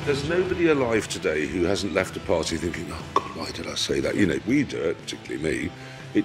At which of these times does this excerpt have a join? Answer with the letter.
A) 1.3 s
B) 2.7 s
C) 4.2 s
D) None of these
C